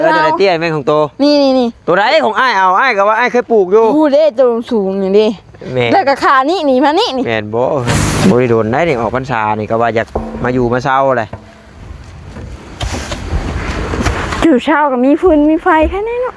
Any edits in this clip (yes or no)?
yes